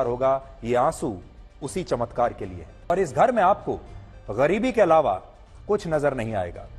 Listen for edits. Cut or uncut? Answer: cut